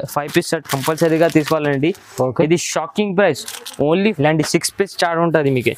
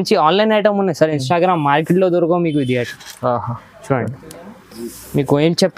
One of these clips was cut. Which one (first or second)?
first